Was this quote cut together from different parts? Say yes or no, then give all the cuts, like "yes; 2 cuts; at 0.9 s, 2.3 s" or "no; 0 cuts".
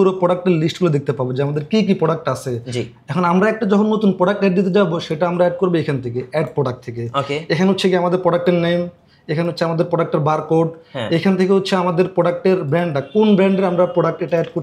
no; 0 cuts